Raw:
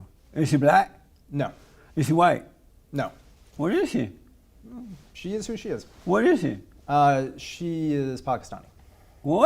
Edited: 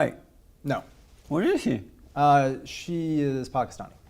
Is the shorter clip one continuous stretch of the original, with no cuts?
no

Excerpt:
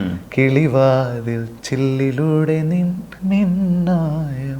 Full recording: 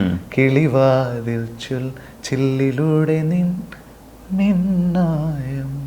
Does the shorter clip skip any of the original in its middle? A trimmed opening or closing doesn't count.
yes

